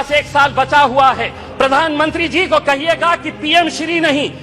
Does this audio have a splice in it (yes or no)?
yes